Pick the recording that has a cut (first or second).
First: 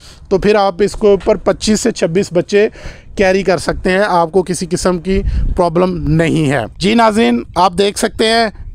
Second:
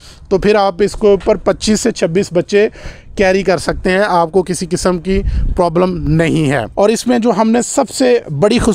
second